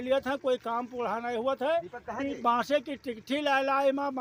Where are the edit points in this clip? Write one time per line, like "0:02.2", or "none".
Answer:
none